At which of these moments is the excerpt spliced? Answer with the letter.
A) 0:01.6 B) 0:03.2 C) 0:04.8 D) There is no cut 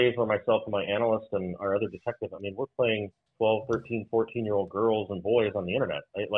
B